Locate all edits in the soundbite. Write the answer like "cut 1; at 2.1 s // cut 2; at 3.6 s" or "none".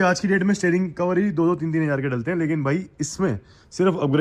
none